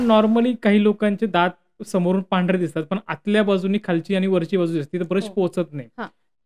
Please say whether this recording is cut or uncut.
uncut